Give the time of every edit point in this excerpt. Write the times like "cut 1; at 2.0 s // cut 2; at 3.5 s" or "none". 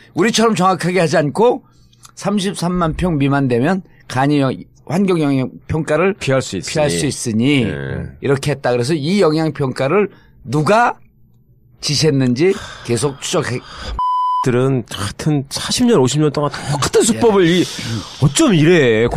cut 1; at 8.4 s